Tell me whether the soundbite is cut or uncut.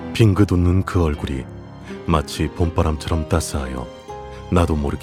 uncut